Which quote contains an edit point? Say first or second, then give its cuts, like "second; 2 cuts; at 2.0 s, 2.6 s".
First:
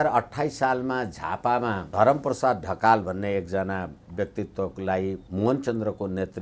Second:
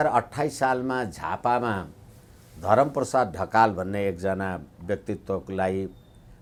first; 2 cuts; at 1.8 s, 5.2 s